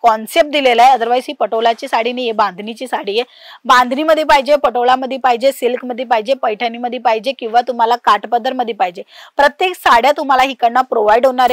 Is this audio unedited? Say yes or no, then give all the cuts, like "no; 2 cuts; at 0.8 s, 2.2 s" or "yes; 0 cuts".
yes; 0 cuts